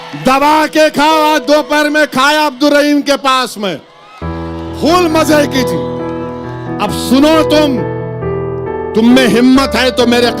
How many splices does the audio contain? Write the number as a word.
two